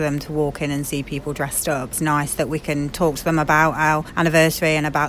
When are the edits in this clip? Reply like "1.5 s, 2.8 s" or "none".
1.9 s, 4.1 s